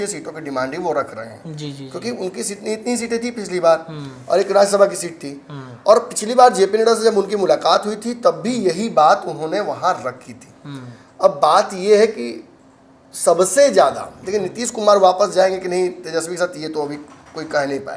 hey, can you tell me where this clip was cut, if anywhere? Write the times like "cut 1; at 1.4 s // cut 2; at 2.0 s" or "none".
none

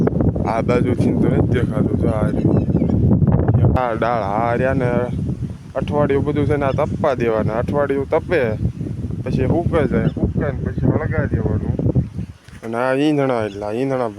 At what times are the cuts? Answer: cut 1; at 3.8 s

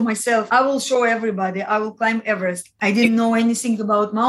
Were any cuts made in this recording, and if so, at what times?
cut 1; at 2.7 s

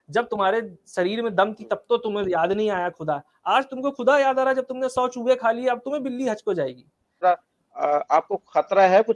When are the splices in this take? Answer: cut 1; at 7.0 s

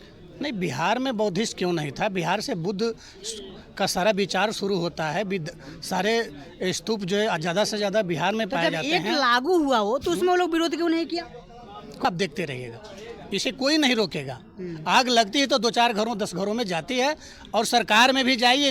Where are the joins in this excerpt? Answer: cut 1; at 12.1 s

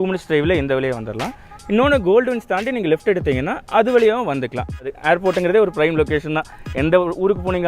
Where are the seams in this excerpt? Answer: cut 1; at 4.9 s

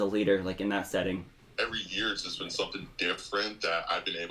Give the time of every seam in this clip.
cut 1; at 1.3 s

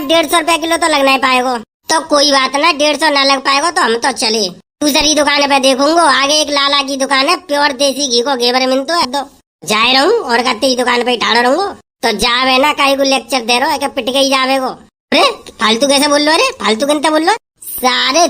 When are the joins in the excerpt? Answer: cut 1; at 9.1 s

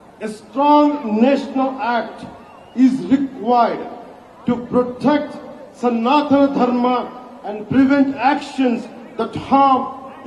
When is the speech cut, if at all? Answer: none

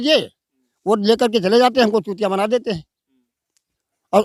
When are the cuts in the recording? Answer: none

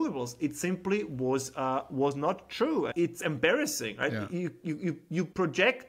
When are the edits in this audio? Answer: cut 1; at 2.9 s

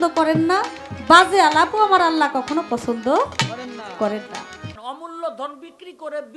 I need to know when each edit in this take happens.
cut 1; at 4.8 s

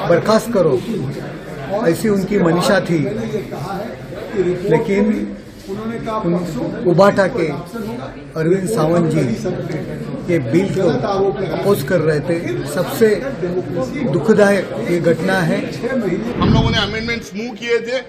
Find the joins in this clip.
cut 1; at 16.4 s

